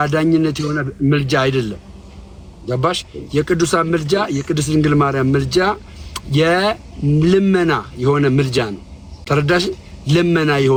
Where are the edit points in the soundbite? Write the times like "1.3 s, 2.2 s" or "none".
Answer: none